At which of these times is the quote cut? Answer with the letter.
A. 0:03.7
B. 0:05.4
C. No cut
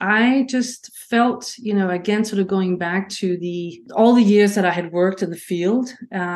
A